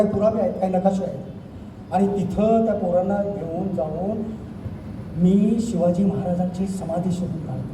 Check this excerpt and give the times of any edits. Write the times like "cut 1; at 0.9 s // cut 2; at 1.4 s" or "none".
none